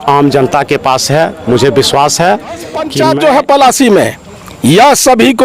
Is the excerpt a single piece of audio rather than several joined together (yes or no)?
no